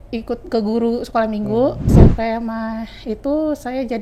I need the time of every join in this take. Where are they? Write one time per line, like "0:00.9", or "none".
0:01.8